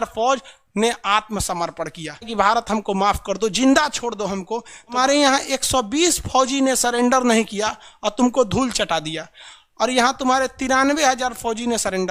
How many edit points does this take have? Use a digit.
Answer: 2